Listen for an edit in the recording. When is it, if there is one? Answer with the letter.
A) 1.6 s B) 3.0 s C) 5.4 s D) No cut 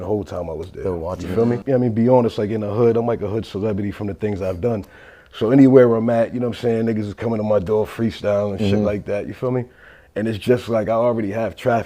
A